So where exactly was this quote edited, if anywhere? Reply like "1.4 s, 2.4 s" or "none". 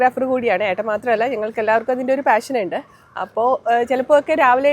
none